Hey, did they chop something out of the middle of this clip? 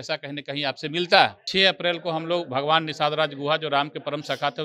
yes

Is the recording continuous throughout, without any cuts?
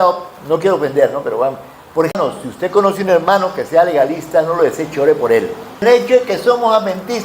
no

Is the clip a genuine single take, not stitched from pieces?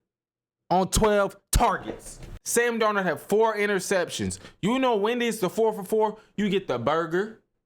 no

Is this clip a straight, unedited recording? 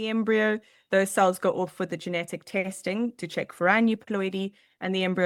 yes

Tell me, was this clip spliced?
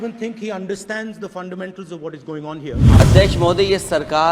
yes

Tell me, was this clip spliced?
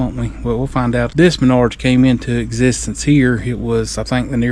yes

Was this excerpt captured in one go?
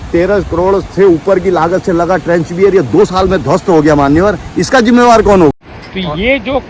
no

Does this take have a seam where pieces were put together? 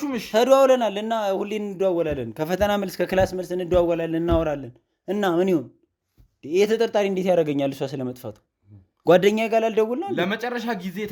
no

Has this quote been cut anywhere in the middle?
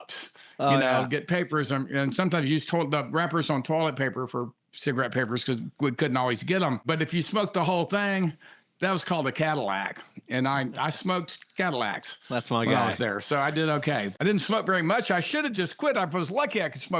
yes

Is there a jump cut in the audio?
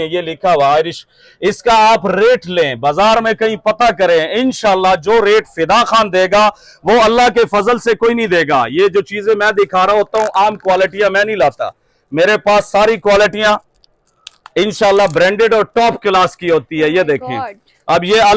no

